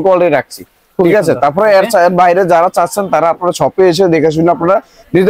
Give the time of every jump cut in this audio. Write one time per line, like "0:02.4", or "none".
none